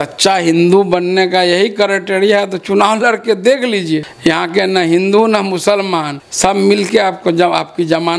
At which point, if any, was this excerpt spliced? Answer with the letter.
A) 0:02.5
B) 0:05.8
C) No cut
C